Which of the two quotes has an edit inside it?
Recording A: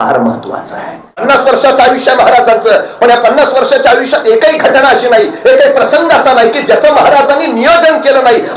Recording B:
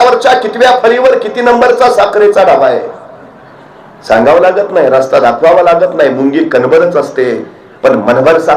A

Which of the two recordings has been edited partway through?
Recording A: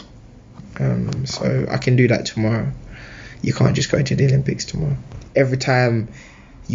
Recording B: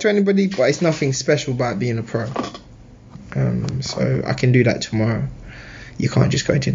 A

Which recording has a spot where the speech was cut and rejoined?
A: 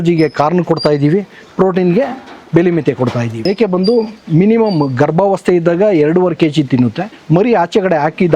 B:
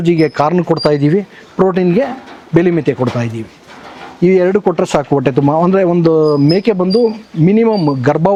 A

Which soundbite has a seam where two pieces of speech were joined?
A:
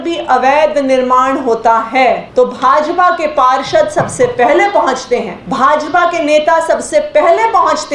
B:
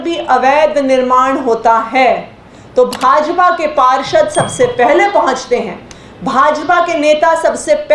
A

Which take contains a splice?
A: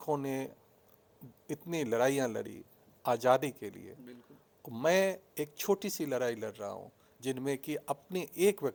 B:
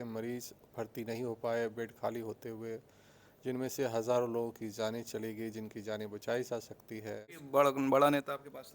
B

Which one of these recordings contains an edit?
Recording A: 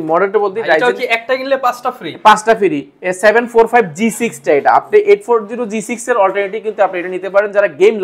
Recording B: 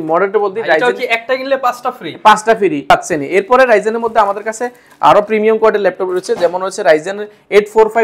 B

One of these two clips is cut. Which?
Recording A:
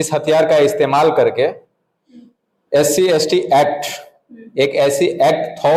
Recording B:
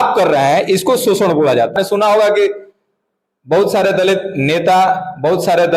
B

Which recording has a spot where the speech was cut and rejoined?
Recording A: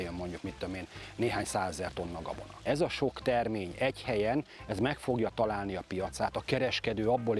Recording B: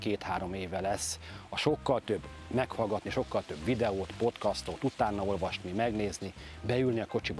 A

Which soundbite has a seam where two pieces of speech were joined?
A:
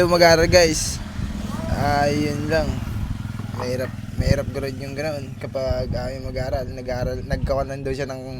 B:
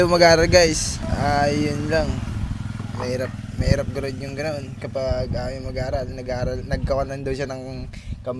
B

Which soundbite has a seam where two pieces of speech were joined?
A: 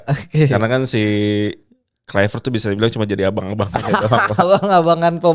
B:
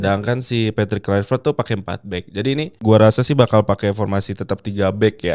B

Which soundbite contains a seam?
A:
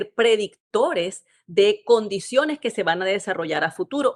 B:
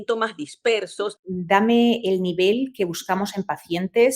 B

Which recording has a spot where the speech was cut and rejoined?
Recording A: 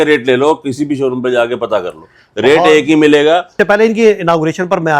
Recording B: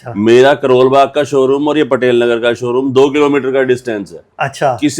A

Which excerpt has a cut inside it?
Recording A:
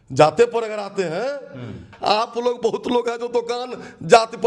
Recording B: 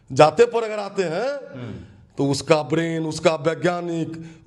A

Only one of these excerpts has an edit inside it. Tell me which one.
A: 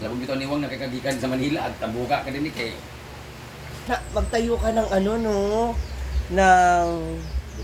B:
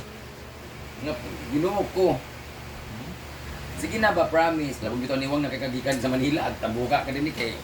A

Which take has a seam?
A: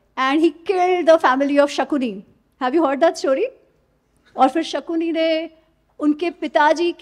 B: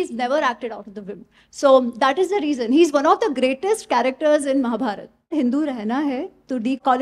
B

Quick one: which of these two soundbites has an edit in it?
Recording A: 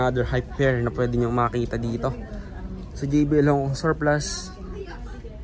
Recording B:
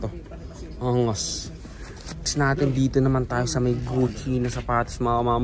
B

